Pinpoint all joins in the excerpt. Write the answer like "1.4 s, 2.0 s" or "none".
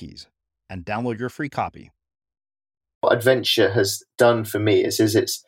3.0 s